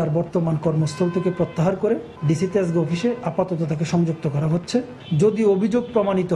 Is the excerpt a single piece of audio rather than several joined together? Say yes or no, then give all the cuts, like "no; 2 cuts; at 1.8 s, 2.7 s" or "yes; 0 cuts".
no; 2 cuts; at 2.1 s, 5.0 s